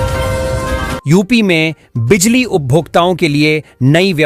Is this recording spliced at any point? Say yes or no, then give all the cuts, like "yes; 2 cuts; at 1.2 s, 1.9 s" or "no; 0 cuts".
no; 0 cuts